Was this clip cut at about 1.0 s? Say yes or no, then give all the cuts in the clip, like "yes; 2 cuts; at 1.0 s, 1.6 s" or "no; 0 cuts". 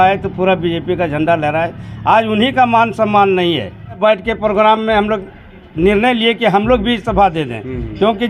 no; 1 cut; at 4.0 s